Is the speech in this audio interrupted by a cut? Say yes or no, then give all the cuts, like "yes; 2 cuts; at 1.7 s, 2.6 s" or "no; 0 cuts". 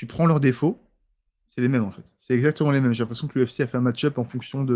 no; 0 cuts